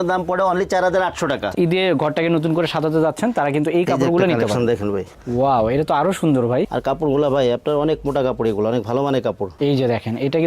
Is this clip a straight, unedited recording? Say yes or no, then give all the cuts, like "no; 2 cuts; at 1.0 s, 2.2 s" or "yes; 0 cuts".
no; 3 cuts; at 1.5 s, 6.7 s, 9.5 s